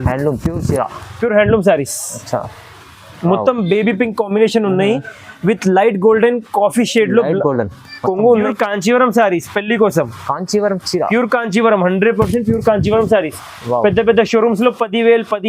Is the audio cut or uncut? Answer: cut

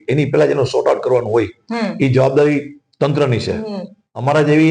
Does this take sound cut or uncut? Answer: uncut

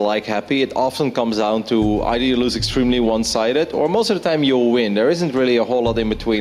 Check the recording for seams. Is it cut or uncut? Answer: cut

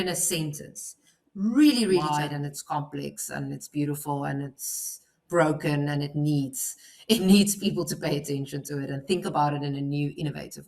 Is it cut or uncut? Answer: cut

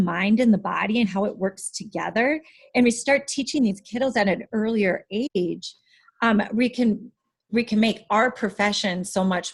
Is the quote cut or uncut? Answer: uncut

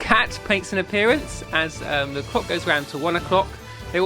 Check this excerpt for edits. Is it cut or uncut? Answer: uncut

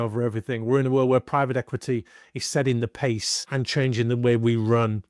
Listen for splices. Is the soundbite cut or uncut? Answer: cut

